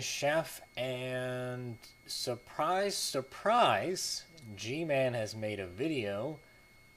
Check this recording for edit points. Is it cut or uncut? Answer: uncut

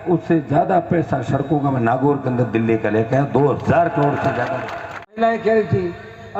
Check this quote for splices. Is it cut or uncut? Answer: cut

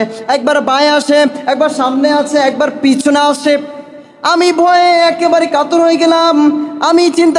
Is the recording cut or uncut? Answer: uncut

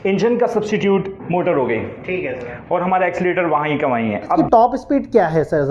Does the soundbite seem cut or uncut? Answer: uncut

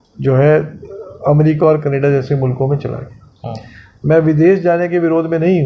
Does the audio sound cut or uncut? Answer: uncut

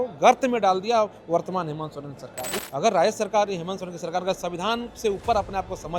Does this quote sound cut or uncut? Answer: cut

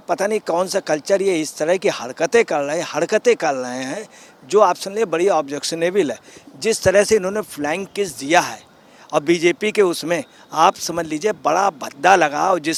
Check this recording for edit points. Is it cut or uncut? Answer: uncut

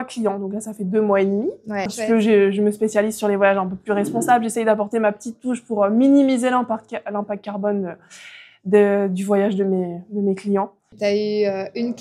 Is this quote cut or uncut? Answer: cut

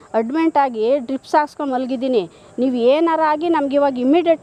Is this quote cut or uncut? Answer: uncut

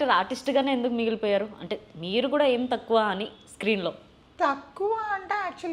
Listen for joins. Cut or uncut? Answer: uncut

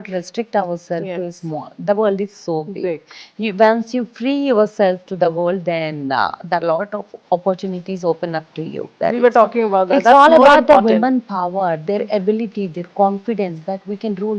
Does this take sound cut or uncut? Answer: cut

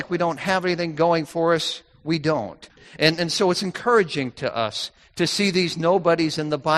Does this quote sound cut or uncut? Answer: cut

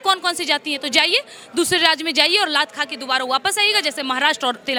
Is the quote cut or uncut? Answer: uncut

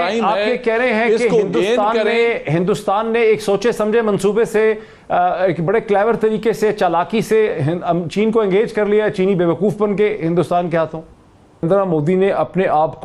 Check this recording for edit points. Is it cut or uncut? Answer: cut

